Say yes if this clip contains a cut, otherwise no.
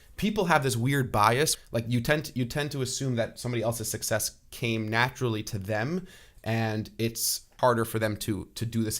yes